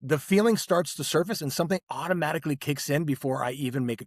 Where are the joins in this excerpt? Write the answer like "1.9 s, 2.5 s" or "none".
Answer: none